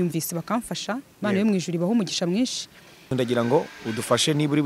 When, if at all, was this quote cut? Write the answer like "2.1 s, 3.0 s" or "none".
3.1 s